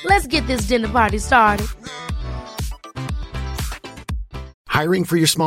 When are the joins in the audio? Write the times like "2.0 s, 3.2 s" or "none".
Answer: 4.5 s